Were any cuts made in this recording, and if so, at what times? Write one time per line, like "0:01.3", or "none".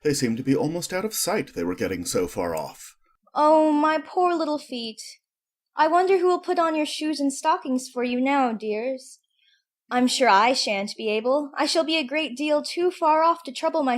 0:05.7